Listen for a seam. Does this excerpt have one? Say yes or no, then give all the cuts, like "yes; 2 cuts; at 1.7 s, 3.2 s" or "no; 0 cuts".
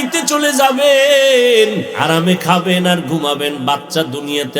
yes; 1 cut; at 1.9 s